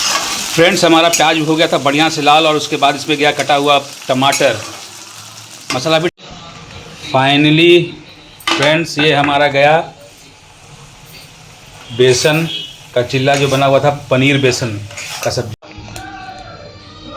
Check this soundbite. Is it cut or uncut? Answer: cut